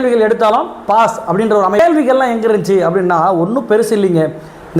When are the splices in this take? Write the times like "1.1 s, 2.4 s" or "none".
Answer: 1.8 s